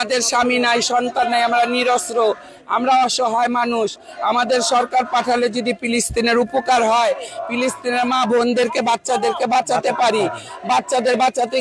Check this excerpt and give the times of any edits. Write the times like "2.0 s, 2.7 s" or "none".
none